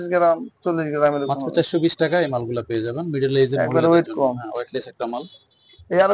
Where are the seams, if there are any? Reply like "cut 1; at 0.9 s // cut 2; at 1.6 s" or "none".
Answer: none